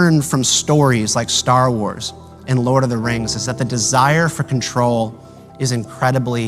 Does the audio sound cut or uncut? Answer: uncut